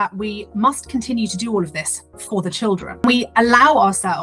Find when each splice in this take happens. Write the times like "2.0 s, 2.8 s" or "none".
3.0 s